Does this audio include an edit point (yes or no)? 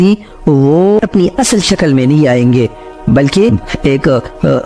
no